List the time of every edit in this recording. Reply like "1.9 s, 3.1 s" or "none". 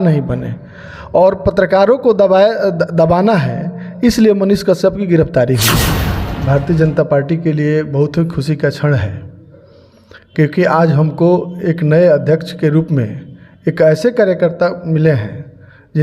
6.1 s